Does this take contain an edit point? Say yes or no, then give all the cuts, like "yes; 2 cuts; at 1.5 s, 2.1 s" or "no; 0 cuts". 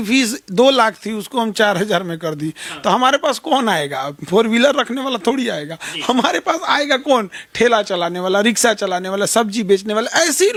no; 0 cuts